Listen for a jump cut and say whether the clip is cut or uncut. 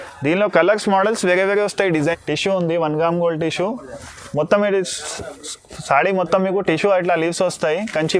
cut